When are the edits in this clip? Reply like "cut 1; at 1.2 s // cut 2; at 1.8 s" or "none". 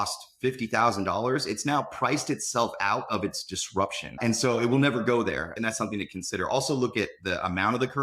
cut 1; at 4.2 s // cut 2; at 5.5 s